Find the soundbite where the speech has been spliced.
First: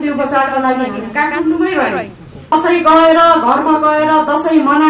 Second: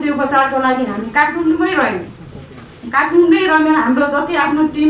first; 1 cut; at 2.5 s

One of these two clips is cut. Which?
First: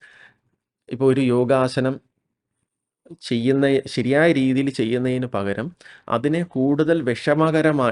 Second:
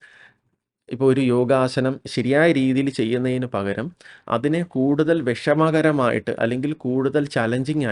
second; 1 cut; at 2.1 s

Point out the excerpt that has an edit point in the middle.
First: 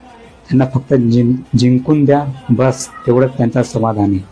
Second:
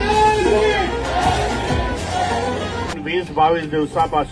second; 1 cut; at 2.9 s

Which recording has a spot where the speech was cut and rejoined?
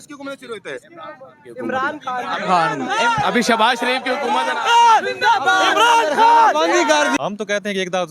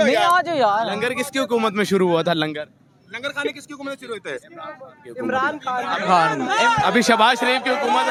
first; 1 cut; at 7.2 s

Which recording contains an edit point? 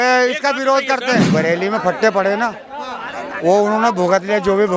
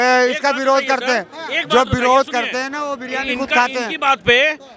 first; 1 cut; at 1.3 s

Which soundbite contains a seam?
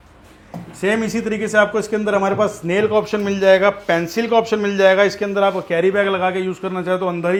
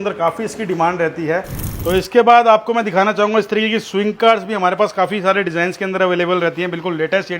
second; 1 cut; at 1.7 s

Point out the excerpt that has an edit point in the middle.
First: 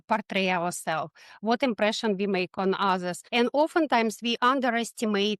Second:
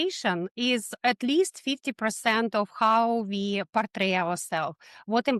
first; 1 cut; at 3.2 s

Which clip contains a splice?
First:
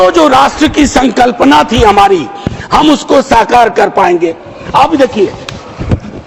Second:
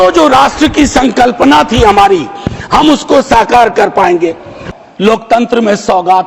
second; 1 cut; at 4.6 s

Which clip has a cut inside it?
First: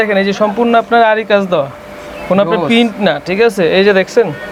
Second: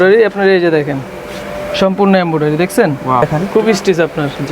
second; 1 cut; at 3.2 s

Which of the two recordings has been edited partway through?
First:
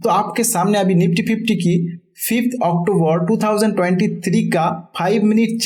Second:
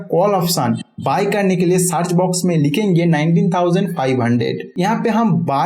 second; 1 cut; at 4.6 s

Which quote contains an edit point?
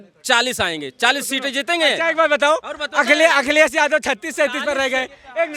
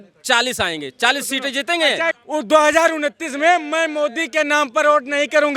second; 1 cut; at 2.1 s

